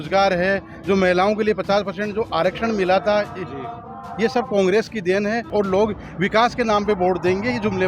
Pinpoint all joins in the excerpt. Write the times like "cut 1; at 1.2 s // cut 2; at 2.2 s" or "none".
cut 1; at 5.5 s